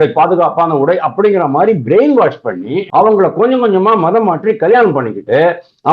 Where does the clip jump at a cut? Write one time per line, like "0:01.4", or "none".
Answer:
0:02.8